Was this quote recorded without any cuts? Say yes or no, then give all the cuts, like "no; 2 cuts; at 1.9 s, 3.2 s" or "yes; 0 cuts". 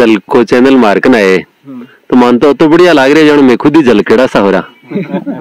yes; 0 cuts